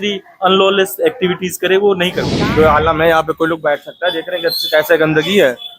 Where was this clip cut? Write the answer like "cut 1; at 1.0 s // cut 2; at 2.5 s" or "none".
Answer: cut 1; at 2.3 s

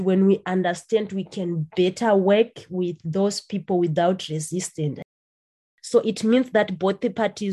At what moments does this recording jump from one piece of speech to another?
cut 1; at 5.2 s

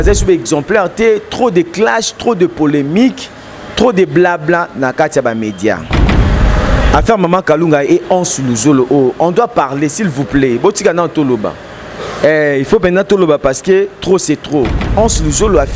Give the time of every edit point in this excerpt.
cut 1; at 6.2 s // cut 2; at 14.8 s

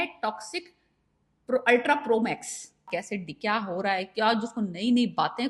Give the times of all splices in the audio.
cut 1; at 2.9 s

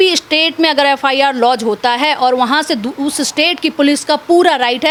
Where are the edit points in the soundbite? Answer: none

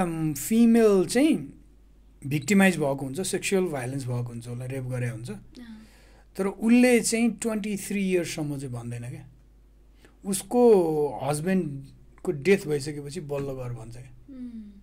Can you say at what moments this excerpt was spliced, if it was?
none

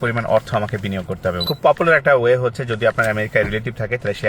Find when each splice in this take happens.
cut 1; at 1.4 s

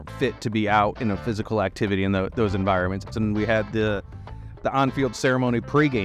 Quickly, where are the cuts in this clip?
cut 1; at 3.0 s

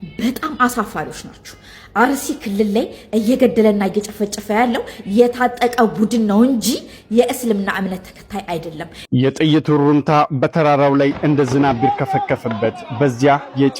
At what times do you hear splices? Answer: cut 1; at 8.9 s

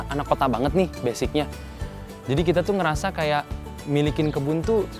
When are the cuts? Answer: none

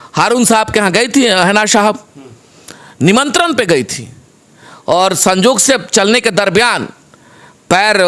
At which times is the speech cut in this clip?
none

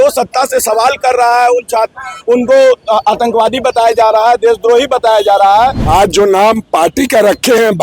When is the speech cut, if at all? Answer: cut 1; at 5.8 s

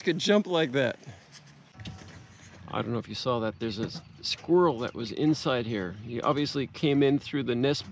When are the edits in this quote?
cut 1; at 1.8 s

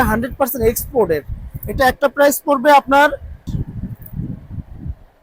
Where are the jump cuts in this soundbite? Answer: cut 1; at 3.5 s

